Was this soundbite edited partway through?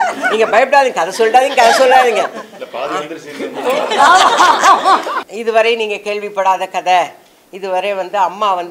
yes; 1 cut; at 5.2 s

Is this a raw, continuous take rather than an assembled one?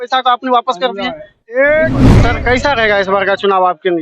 no; 1 cut; at 2.1 s

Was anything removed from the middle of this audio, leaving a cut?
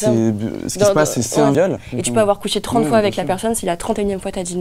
yes; 1 cut; at 1.8 s

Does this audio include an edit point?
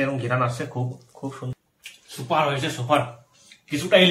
yes; 1 cut; at 1.5 s

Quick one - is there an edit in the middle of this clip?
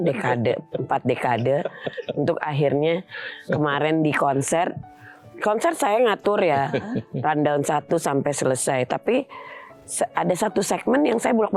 no; 0 cuts

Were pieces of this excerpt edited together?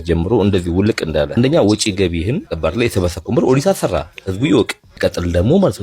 yes; 3 cuts; at 1.4 s, 2.5 s, 4.8 s

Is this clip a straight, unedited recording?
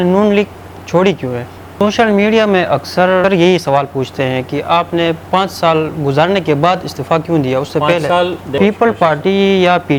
no; 3 cuts; at 1.7 s, 3.2 s, 8.4 s

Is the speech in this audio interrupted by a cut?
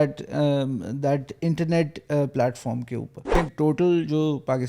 yes; 1 cut; at 3.3 s

